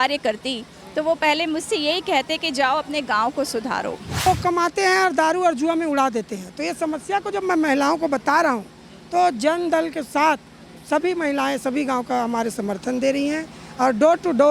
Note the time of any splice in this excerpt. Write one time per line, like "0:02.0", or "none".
0:04.2